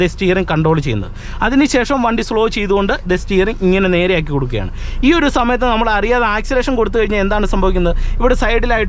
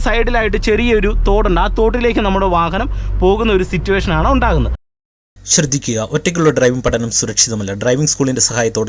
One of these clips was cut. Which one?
second; 1 cut; at 4.8 s

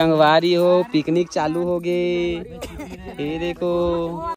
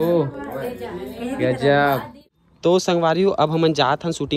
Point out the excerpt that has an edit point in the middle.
second; 1 cut; at 2.1 s

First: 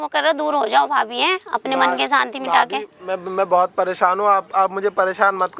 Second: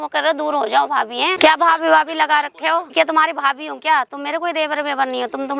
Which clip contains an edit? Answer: second; 2 cuts; at 1.4 s, 2.9 s

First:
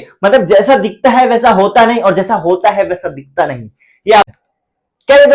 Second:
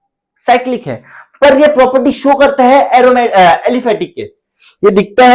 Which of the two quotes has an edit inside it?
first; 1 cut; at 4.2 s

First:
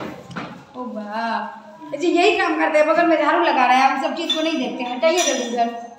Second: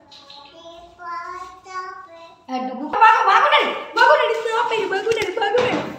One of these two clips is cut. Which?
second; 1 cut; at 2.9 s

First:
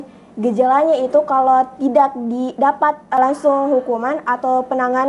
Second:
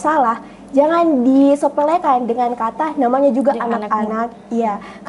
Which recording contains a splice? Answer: first; 1 cut; at 3.2 s

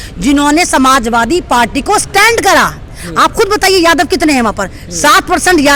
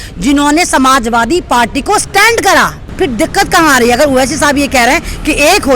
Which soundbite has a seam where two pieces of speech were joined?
second; 1 cut; at 2.8 s

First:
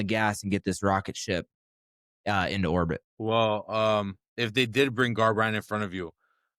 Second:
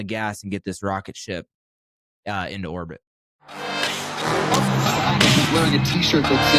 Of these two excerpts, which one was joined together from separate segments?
second; 1 cut; at 3.2 s

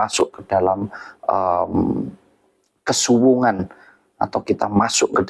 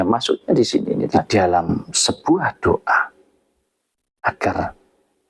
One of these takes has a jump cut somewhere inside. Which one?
second; 1 cut; at 1.2 s

